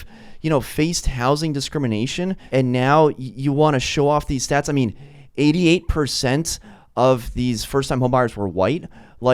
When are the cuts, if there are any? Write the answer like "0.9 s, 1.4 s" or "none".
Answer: 2.4 s